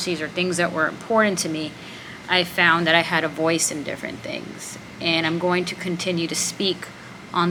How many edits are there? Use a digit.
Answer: 0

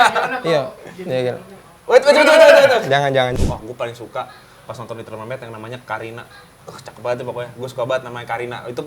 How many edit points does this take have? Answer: 1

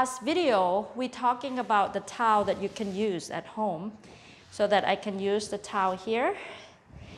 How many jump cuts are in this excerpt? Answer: 0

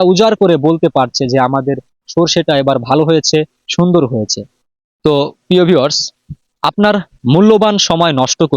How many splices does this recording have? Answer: 0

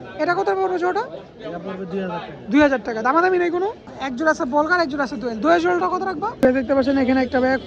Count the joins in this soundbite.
2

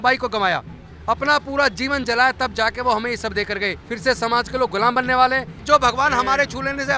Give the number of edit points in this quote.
2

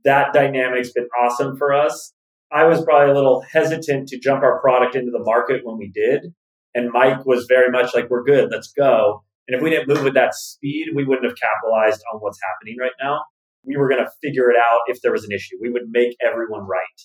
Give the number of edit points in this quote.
1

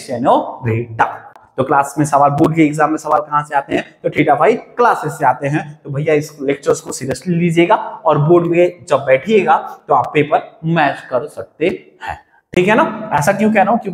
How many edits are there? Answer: 1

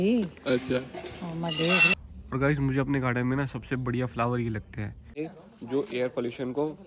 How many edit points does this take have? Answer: 2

